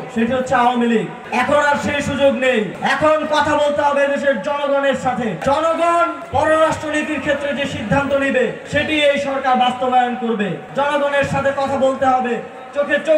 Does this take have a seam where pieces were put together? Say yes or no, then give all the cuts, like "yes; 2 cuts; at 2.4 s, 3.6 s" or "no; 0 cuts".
yes; 6 cuts; at 1.2 s, 2.7 s, 5.4 s, 6.2 s, 8.6 s, 10.6 s